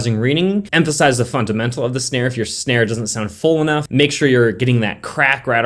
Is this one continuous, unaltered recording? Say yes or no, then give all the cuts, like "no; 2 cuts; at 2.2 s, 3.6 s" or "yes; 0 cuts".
yes; 0 cuts